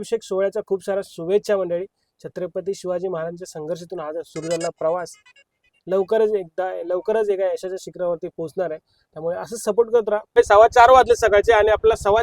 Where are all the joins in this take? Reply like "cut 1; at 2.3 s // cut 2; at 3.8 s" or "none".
cut 1; at 10.4 s